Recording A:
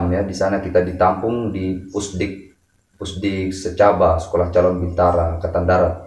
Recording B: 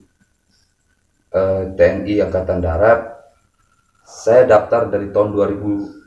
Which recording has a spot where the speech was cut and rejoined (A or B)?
B